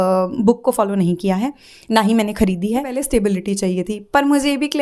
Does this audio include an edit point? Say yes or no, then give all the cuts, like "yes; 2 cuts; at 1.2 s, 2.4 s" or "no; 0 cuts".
yes; 1 cut; at 3.0 s